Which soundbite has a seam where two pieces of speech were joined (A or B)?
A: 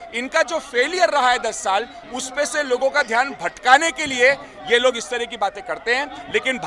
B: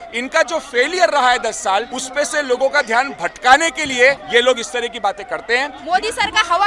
B